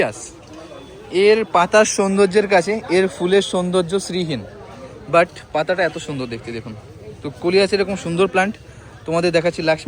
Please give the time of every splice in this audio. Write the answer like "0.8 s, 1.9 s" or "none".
none